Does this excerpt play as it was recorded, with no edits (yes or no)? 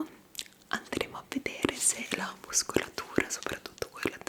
yes